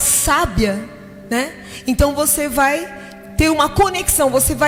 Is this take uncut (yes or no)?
yes